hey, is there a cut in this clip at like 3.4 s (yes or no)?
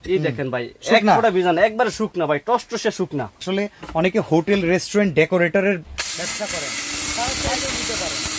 yes